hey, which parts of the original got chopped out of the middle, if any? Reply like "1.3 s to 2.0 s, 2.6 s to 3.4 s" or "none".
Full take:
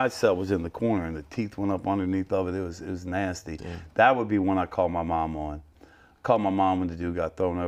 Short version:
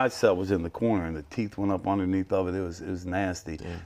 none